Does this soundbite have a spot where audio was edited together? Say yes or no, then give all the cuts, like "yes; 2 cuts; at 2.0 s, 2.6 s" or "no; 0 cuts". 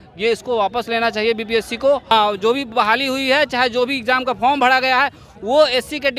yes; 1 cut; at 2.1 s